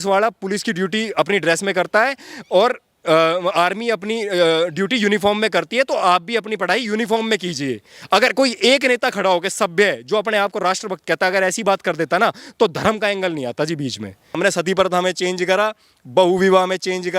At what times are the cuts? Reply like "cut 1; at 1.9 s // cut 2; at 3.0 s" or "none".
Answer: cut 1; at 14.4 s